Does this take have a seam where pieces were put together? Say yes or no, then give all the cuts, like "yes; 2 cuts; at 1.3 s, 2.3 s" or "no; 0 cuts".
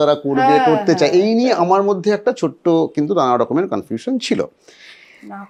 no; 0 cuts